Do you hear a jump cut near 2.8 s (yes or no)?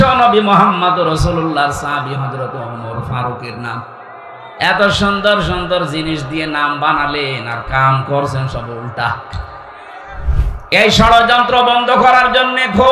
no